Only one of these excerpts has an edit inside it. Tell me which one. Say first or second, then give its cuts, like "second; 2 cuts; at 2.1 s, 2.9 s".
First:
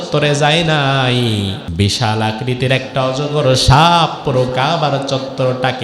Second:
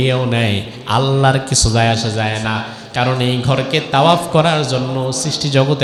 first; 1 cut; at 1.6 s